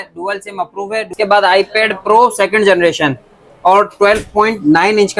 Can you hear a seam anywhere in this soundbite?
yes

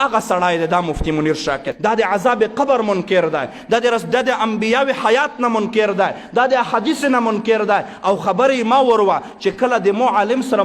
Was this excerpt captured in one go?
no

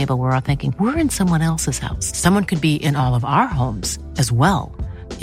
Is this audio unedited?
yes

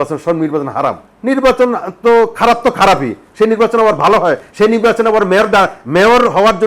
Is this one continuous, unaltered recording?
no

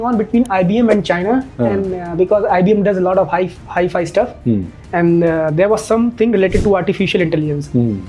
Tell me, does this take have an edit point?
no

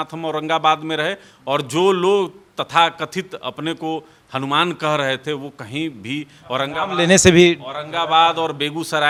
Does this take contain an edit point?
no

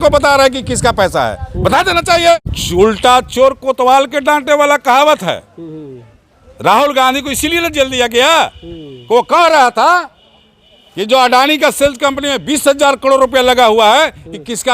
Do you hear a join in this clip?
yes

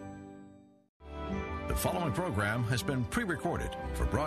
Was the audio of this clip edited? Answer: yes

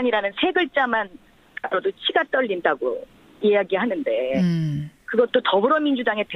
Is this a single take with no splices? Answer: yes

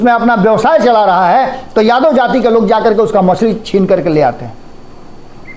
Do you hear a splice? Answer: no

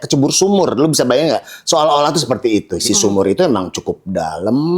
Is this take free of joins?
no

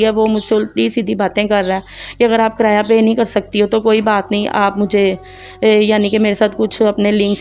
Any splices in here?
no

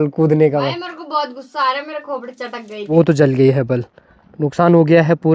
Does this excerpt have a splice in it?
yes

